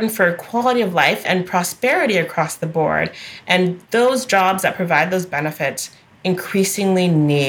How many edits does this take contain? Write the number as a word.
one